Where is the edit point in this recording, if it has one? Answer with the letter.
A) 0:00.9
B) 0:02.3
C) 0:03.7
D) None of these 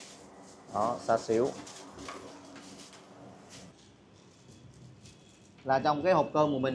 C